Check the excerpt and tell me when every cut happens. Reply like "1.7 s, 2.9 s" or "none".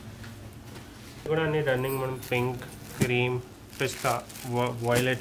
1.2 s